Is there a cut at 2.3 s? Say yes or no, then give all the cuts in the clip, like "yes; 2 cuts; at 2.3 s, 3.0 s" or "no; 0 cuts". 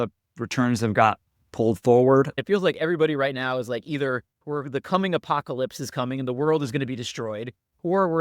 yes; 1 cut; at 2.3 s